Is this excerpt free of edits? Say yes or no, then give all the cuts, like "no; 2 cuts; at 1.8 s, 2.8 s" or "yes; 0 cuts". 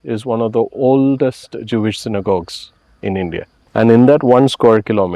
no; 1 cut; at 3.6 s